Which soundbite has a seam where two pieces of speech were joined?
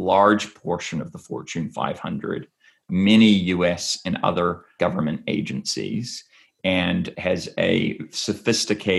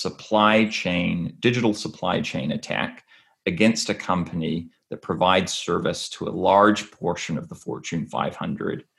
first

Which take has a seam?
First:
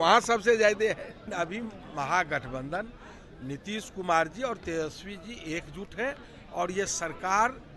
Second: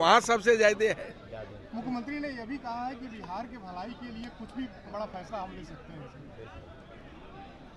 first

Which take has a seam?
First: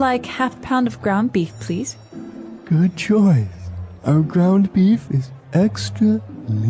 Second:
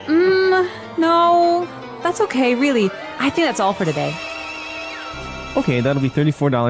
second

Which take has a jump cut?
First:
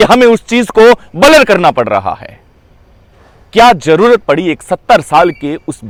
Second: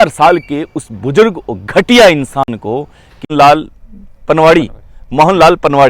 second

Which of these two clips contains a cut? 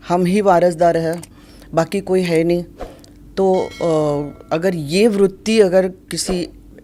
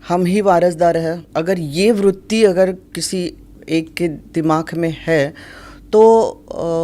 second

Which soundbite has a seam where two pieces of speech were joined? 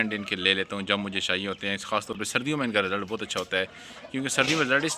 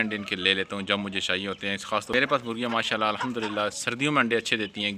second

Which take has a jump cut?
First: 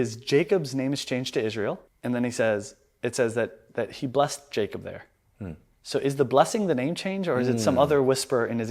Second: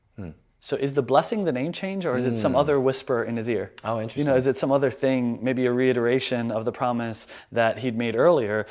first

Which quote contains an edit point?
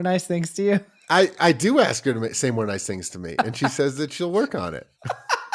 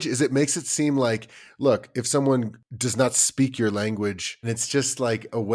second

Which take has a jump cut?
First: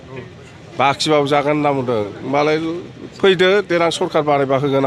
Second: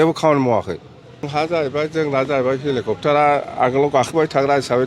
second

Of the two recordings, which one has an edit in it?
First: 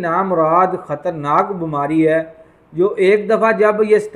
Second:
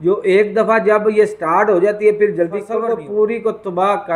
second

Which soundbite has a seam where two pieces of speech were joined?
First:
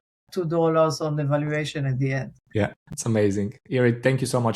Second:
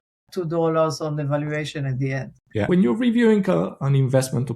second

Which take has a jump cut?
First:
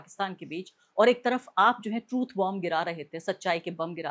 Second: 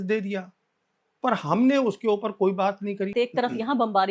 second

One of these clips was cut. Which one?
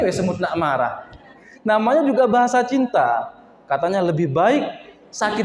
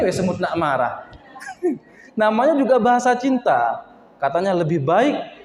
first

